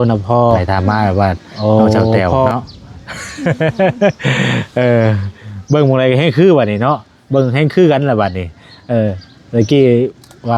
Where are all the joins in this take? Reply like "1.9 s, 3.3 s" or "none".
2.5 s